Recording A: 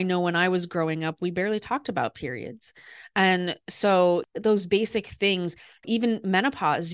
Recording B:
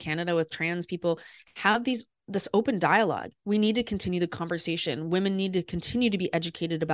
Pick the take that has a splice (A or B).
A